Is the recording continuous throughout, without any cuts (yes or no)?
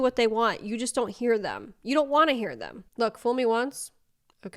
no